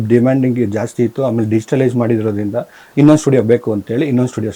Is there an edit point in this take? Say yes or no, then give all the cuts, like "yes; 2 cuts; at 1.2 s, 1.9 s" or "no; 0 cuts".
no; 0 cuts